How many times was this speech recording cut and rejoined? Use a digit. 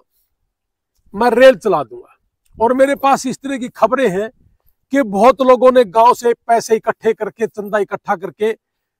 0